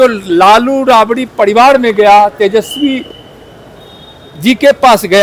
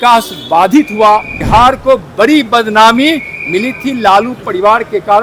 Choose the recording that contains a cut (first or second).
second